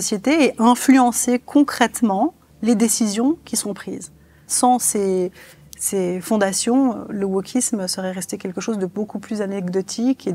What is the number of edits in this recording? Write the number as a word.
one